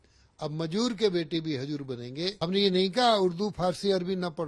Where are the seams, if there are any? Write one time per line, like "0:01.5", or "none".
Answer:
0:02.3